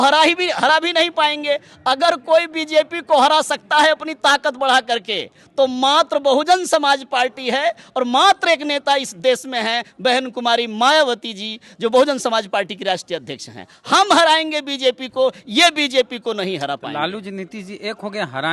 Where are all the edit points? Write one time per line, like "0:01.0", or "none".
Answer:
none